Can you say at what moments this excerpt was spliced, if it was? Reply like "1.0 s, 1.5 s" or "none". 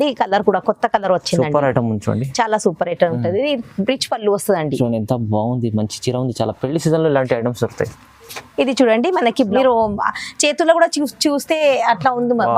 9.5 s

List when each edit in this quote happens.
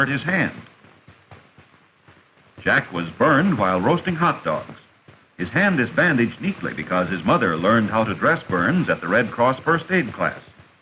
3.0 s

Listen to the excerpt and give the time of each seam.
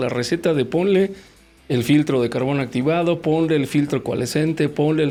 none

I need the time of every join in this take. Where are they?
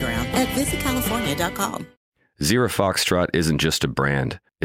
1.9 s

